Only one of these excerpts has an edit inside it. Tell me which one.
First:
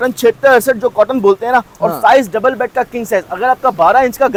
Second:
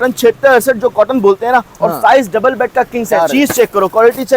second; 1 cut; at 3.1 s

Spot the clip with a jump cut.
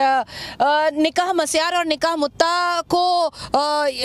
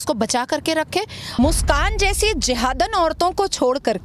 second; 1 cut; at 1.2 s

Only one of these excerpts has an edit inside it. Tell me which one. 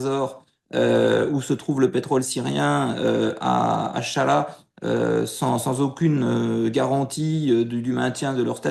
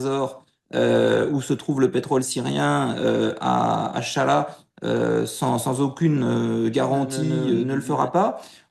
second; 1 cut; at 7.6 s

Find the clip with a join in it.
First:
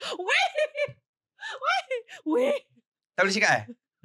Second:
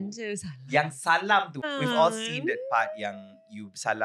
second; 1 cut; at 1.7 s

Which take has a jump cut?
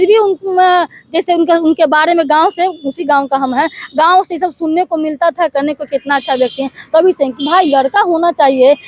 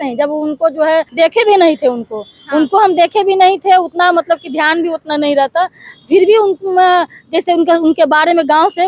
second; 1 cut; at 1.1 s

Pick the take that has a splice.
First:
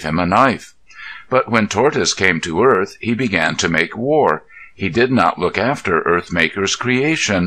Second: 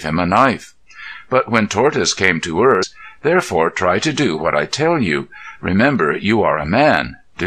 first; 1 cut; at 3.0 s

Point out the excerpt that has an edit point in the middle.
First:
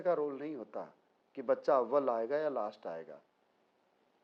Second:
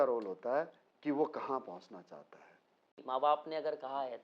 second; 1 cut; at 3.2 s

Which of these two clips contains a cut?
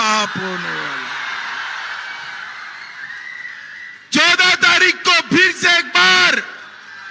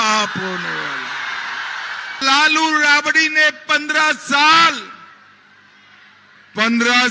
second; 1 cut; at 2.2 s

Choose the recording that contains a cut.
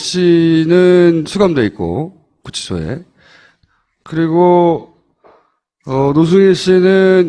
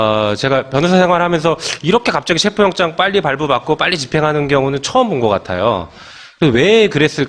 first; 1 cut; at 6.3 s

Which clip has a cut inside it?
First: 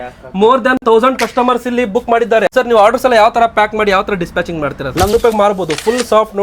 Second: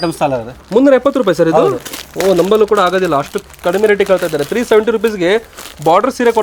first; 1 cut; at 5.1 s

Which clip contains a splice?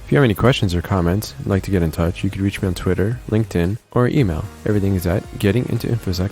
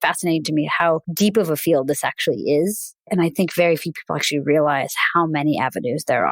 second; 2 cuts; at 1.1 s, 2.9 s

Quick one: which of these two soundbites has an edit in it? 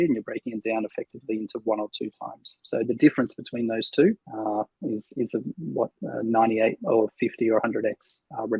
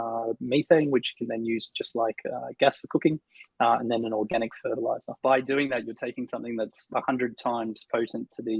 second; 1 cut; at 5.2 s

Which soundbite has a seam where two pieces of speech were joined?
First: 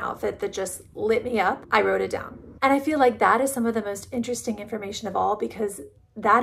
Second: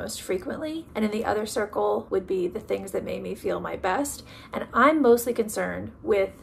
second; 1 cut; at 2.0 s

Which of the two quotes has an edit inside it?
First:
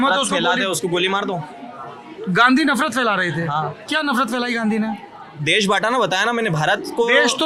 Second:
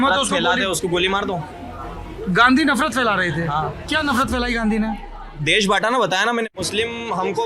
second; 1 cut; at 6.5 s

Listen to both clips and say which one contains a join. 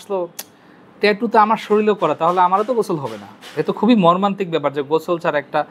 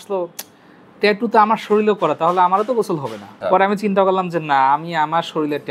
second; 1 cut; at 3.4 s

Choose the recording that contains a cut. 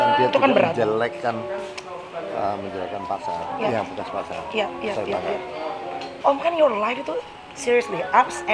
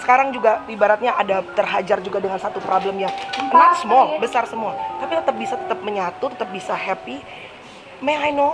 first; 1 cut; at 6.1 s

